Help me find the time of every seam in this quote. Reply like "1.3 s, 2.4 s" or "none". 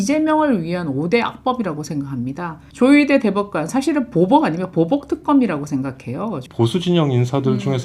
2.6 s, 6.5 s

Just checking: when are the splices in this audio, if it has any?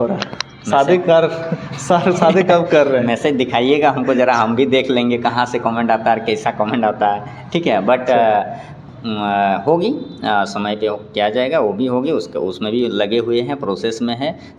none

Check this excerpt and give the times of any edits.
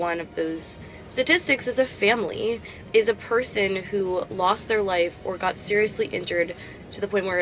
none

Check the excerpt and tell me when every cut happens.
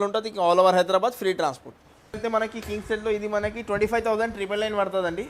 2.0 s

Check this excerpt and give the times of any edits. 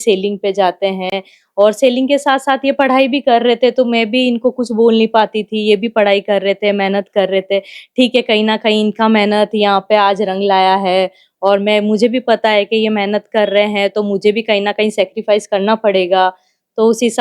none

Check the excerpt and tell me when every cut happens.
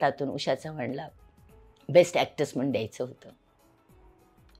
none

